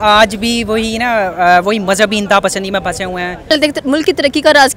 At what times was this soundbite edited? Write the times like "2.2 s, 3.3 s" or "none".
3.5 s